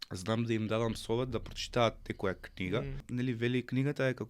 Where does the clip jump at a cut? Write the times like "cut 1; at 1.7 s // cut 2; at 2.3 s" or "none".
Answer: cut 1; at 3.1 s